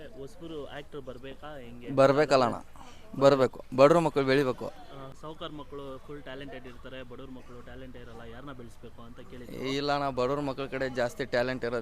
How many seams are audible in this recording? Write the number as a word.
one